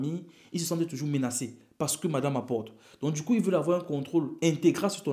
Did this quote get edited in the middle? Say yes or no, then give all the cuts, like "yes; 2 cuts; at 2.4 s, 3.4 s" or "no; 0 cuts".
no; 0 cuts